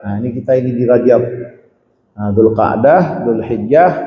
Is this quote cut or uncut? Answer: uncut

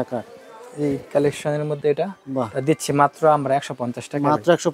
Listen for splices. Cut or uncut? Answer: uncut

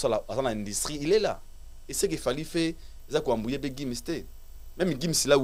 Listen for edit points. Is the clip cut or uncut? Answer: uncut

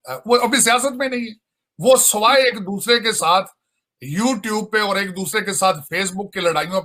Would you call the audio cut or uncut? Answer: uncut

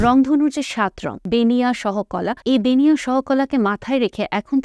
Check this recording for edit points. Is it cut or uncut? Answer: cut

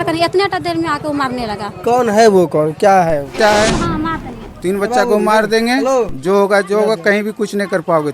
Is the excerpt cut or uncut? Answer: cut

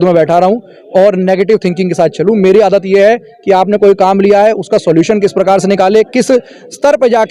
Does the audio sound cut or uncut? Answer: uncut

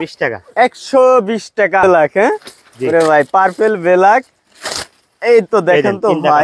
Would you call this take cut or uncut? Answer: cut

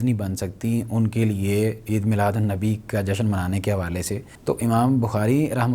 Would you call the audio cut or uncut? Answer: cut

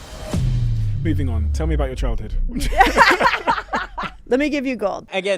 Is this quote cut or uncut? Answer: uncut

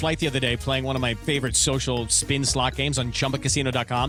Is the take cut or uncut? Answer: uncut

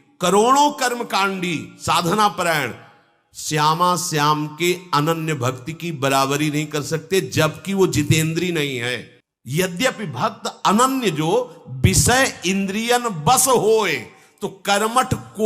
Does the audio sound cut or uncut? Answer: uncut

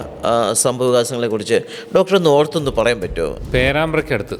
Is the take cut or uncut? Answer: cut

